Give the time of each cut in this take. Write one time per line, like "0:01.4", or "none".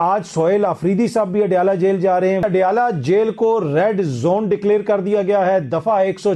0:02.4